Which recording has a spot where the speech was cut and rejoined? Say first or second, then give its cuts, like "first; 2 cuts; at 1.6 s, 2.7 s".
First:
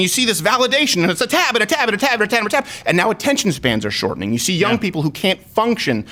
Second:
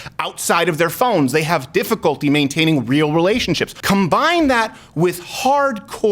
second; 1 cut; at 3.7 s